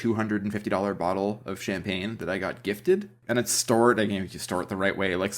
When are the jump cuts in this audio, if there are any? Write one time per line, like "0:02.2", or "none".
0:03.2